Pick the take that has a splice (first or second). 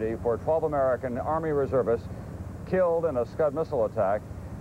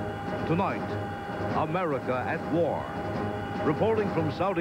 first